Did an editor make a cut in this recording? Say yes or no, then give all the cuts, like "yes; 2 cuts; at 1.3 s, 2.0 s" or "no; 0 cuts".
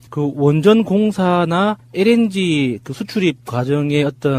yes; 1 cut; at 1.7 s